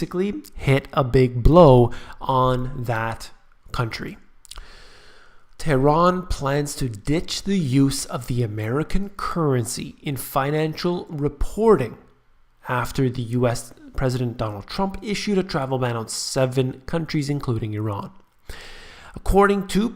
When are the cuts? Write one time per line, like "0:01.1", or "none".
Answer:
0:08.3